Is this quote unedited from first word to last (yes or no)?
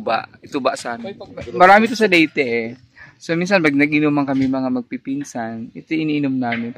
no